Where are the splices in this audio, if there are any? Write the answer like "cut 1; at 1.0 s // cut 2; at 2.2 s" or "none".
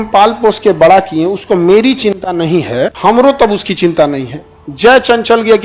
none